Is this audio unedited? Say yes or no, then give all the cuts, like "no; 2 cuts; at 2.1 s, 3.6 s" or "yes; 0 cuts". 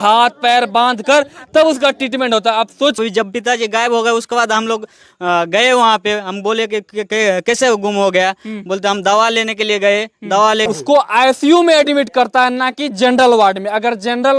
no; 1 cut; at 10.7 s